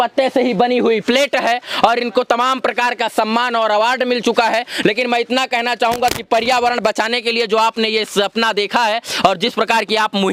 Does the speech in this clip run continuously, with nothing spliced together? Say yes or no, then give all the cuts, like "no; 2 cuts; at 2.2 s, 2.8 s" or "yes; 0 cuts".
yes; 0 cuts